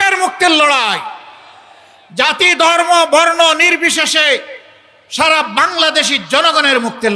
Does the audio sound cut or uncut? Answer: uncut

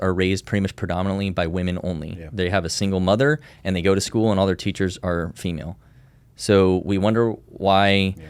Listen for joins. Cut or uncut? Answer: uncut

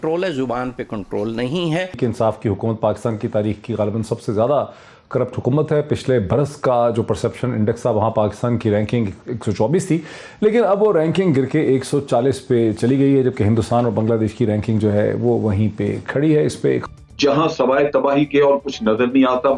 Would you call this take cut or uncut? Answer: cut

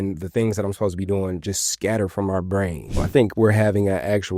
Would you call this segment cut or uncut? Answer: cut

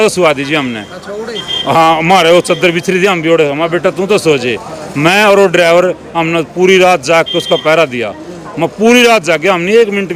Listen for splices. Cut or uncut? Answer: uncut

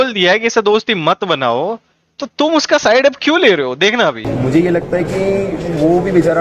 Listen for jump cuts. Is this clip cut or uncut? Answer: cut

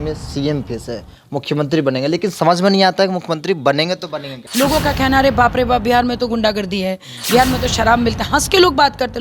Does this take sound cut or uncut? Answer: cut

